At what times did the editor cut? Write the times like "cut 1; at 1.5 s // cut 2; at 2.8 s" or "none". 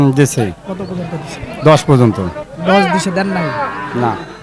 none